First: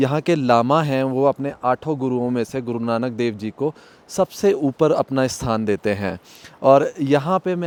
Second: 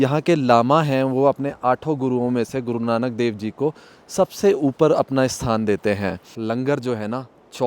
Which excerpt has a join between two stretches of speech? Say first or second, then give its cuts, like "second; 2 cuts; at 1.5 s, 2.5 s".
second; 1 cut; at 6.3 s